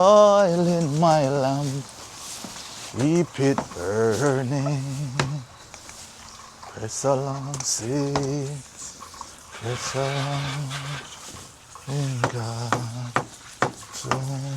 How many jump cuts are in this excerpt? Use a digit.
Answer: 0